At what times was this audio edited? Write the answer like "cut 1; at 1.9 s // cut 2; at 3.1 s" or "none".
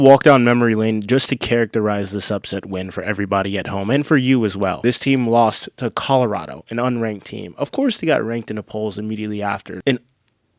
cut 1; at 4.8 s // cut 2; at 9.7 s